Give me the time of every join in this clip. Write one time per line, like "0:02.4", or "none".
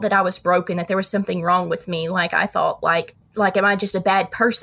0:03.2